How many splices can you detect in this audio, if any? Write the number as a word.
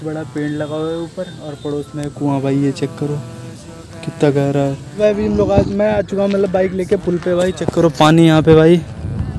one